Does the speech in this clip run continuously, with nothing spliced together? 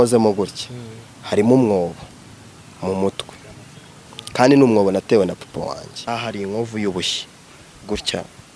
no; 1 cut; at 6.1 s

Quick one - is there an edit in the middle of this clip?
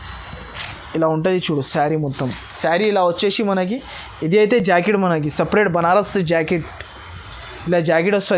no; 0 cuts

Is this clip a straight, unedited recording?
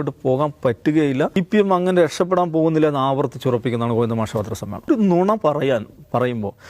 no; 2 cuts; at 1.4 s, 4.9 s

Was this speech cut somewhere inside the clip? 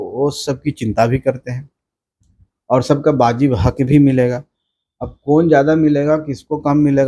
no; 0 cuts

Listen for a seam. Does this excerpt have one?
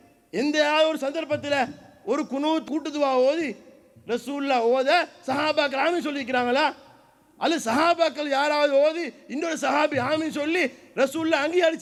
no; 0 cuts

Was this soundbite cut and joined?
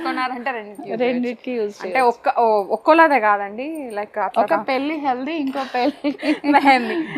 no; 0 cuts

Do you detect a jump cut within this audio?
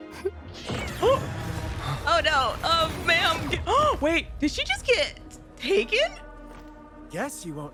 no; 0 cuts

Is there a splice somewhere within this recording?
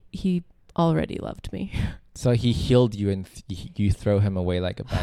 yes; 1 cut; at 2.2 s

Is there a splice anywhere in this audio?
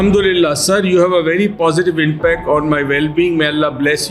no; 0 cuts

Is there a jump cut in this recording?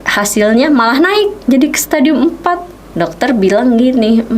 yes; 2 cuts; at 1.4 s, 2.8 s

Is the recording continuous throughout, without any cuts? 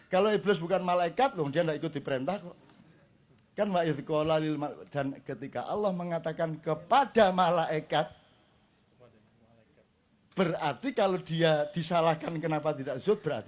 yes; 0 cuts

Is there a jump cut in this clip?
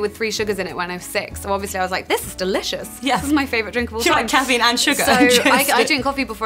no; 0 cuts

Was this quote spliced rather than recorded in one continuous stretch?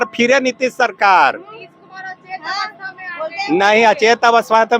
no; 0 cuts

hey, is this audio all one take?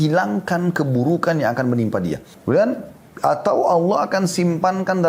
no; 1 cut; at 2.3 s

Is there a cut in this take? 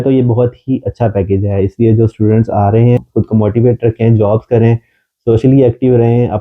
yes; 1 cut; at 3.0 s

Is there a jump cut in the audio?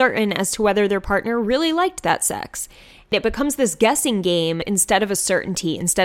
yes; 2 cuts; at 3.1 s, 4.6 s

